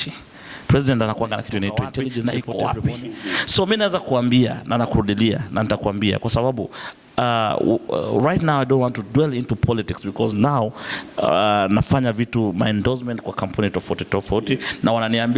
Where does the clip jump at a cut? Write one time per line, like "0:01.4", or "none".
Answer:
0:02.2